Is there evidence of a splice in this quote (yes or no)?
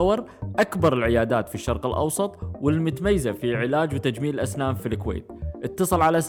no